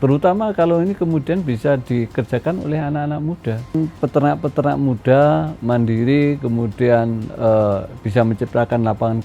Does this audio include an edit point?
yes; 1 cut; at 3.8 s

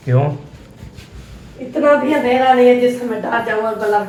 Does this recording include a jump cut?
no; 0 cuts

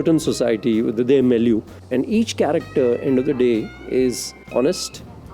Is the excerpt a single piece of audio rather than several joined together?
no; 2 cuts; at 1.8 s, 4.4 s

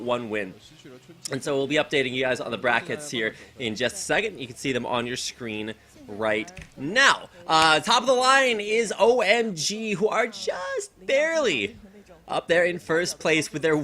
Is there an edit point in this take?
yes; 1 cut; at 7.9 s

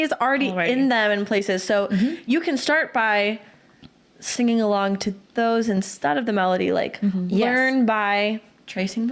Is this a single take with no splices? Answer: yes; 0 cuts

